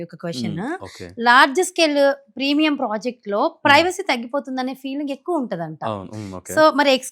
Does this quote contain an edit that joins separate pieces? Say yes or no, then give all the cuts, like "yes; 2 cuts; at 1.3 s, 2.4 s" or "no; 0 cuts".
no; 0 cuts